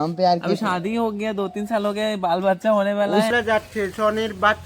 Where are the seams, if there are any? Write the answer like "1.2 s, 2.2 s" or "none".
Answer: 3.3 s